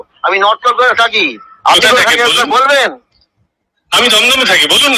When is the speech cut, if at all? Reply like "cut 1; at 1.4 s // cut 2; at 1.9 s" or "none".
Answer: none